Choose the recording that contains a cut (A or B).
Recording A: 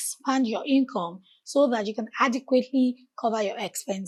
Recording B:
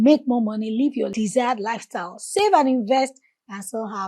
B